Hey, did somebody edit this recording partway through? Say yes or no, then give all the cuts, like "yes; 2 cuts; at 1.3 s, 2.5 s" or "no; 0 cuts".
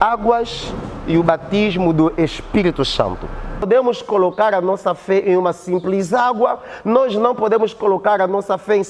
yes; 1 cut; at 3.7 s